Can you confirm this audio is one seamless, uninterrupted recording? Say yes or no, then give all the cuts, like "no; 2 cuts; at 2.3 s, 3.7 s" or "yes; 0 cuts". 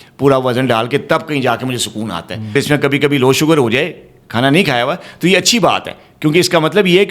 no; 1 cut; at 2.5 s